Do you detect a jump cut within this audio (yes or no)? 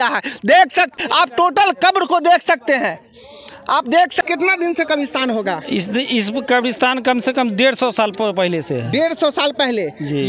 no